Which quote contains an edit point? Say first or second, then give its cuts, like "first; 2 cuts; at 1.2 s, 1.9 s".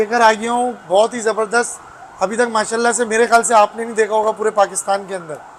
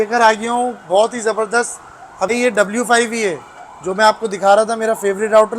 second; 1 cut; at 2.3 s